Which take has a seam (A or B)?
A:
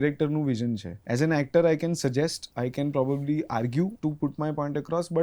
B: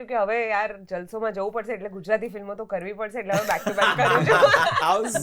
A